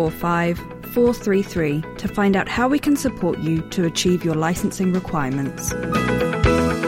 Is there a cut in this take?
yes; 1 cut; at 5.7 s

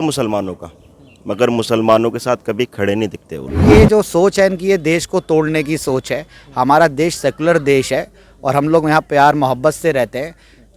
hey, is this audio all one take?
no; 1 cut; at 3.6 s

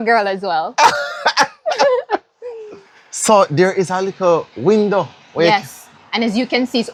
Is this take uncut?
yes; 0 cuts

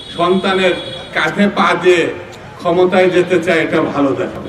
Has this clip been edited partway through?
no; 0 cuts

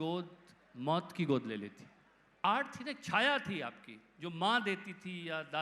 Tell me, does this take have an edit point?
yes; 1 cut; at 2.4 s

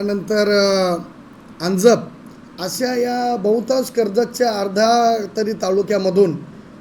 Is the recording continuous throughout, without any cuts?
yes; 0 cuts

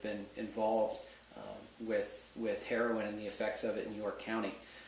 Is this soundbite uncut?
no; 1 cut; at 1.7 s

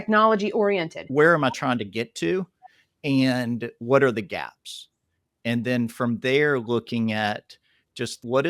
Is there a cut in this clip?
yes; 1 cut; at 1.1 s

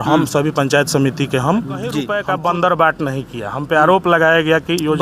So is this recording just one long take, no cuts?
no; 1 cut; at 2.1 s

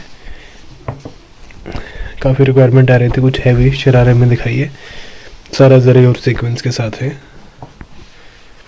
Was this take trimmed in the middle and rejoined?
no; 0 cuts

